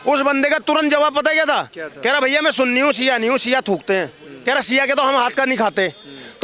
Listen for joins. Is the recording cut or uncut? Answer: uncut